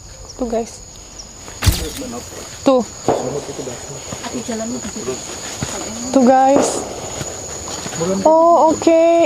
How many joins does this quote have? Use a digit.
1